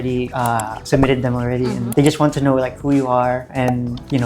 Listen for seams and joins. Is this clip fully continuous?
no; 1 cut; at 1.9 s

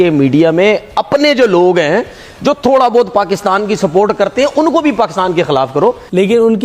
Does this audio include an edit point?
yes; 1 cut; at 5.5 s

